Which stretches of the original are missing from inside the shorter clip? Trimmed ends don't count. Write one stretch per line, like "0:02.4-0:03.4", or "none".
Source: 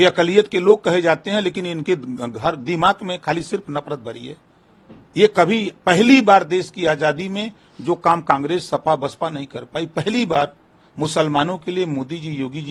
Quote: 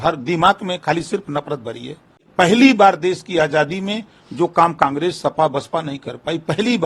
0:04.6-0:05.7

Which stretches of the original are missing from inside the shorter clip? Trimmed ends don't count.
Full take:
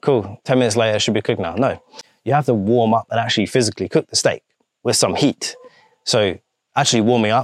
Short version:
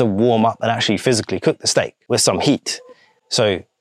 0:04.5-0:04.7

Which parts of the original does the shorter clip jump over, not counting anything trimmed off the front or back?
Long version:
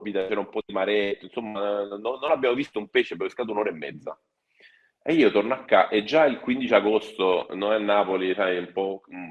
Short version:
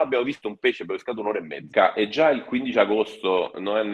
0:04.0-0:05.6

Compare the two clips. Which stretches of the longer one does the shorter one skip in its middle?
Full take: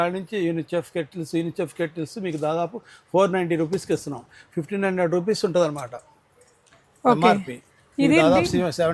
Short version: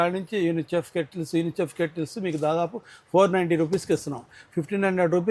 none

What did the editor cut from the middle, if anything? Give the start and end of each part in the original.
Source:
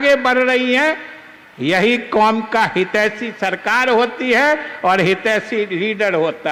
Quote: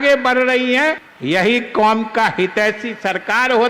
0:01.1-0:01.5

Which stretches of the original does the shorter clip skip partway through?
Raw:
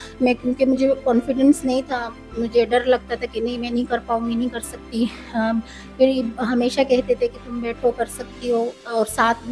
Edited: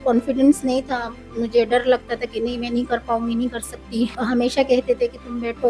0:05.2-0:06.4

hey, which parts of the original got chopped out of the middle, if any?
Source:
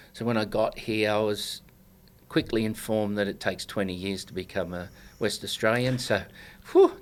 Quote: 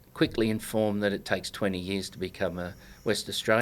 none

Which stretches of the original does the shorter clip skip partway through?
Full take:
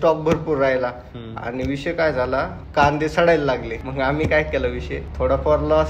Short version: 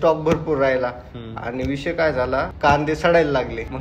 0:02.5-0:02.7

